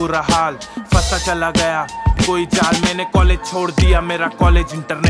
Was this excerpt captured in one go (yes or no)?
no